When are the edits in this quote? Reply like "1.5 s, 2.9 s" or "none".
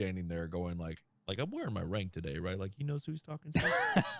1.1 s